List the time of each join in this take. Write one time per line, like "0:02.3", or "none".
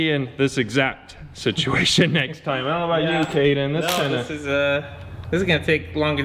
none